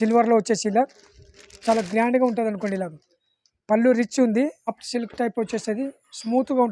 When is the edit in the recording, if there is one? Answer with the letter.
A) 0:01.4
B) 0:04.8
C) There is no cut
B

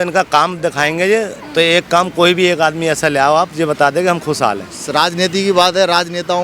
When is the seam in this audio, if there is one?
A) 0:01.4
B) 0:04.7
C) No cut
B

